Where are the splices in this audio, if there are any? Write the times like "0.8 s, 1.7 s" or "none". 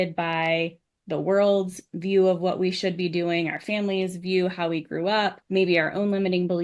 5.4 s